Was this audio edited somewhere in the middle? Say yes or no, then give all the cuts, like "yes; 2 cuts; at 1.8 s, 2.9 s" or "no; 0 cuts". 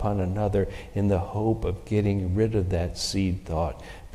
no; 0 cuts